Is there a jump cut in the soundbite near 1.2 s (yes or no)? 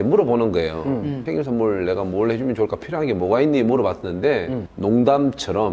yes